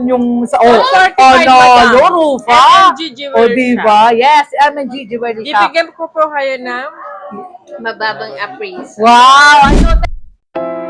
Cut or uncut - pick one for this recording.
cut